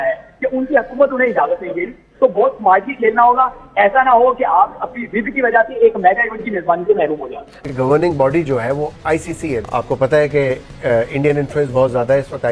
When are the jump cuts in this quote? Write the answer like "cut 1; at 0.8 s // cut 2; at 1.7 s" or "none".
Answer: cut 1; at 7.6 s